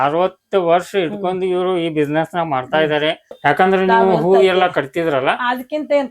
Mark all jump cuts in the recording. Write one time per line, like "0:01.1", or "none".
0:03.3